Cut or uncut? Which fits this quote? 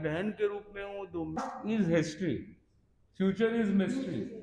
cut